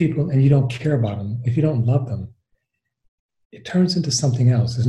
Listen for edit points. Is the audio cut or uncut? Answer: uncut